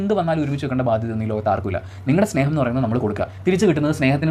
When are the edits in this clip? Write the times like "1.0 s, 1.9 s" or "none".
none